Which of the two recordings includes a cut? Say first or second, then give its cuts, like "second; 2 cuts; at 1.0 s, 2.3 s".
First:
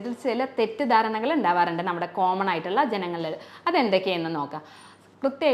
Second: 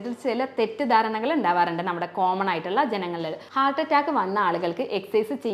second; 1 cut; at 3.4 s